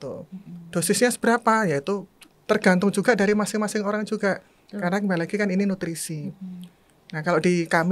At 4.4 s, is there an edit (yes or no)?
no